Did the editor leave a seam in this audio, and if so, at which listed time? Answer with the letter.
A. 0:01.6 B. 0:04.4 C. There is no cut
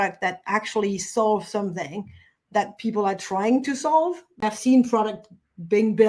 B